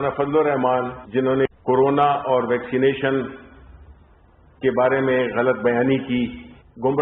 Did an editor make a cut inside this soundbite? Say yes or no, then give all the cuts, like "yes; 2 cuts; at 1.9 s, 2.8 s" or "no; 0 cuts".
yes; 1 cut; at 1.0 s